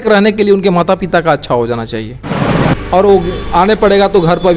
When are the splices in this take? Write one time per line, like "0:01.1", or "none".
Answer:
0:02.6